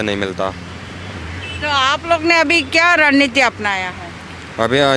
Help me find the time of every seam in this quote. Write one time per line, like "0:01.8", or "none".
none